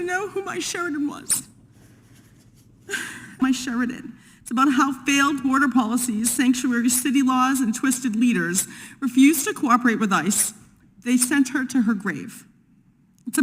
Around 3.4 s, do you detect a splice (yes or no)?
yes